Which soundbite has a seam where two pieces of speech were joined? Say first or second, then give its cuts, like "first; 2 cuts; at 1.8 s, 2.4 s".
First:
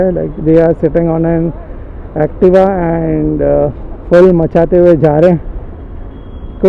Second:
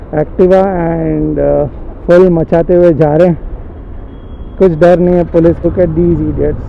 second; 1 cut; at 5.6 s